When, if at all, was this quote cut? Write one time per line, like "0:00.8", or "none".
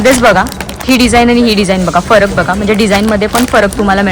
none